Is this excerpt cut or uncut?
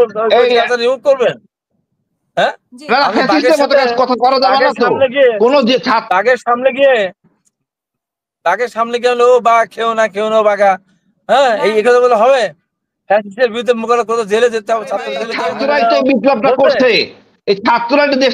cut